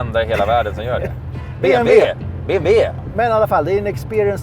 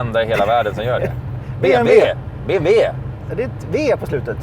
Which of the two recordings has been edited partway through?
first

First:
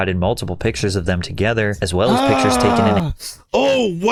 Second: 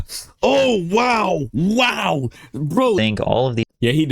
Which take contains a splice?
second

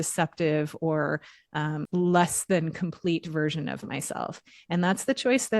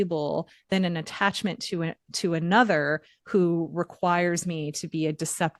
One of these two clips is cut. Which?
first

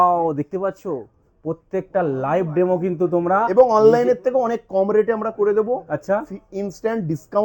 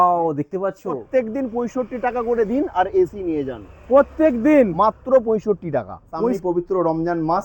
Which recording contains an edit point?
second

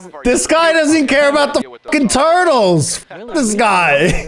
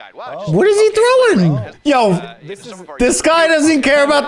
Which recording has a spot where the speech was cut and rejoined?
second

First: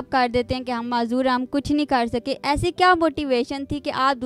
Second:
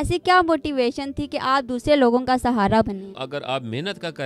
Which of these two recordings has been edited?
second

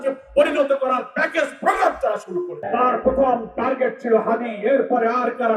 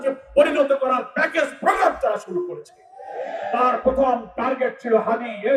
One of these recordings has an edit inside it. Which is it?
first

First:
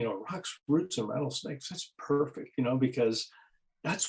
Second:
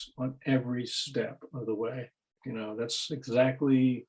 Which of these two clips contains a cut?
second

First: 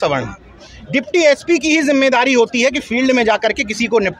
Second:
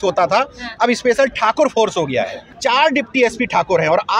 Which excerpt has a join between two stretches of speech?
second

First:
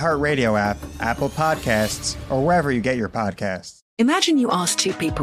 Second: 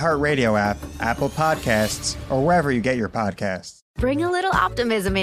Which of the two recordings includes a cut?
first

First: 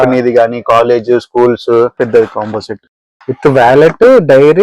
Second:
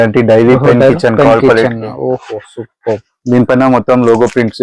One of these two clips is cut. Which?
first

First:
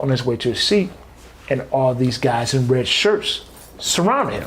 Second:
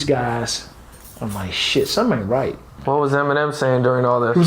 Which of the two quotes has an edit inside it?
second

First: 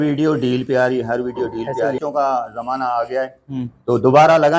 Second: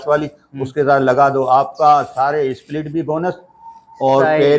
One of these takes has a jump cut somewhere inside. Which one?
first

